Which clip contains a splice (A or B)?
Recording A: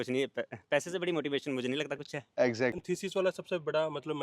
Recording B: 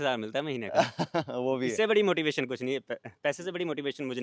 A